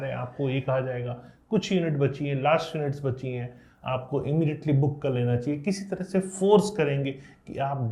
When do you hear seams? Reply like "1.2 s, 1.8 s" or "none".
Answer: none